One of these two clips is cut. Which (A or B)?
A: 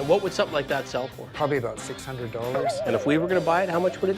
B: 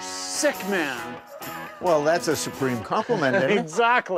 A